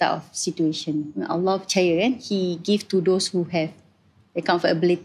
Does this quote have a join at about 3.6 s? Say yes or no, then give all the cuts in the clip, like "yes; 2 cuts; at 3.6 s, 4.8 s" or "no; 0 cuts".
no; 2 cuts; at 1.1 s, 2.2 s